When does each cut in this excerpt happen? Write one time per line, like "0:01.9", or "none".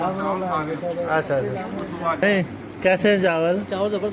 0:02.2